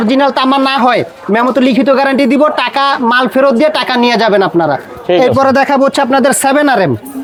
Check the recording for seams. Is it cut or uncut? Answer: uncut